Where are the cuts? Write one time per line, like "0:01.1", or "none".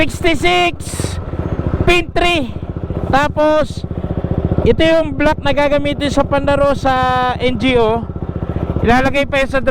none